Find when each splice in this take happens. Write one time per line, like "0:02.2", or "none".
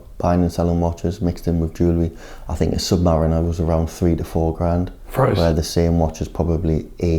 none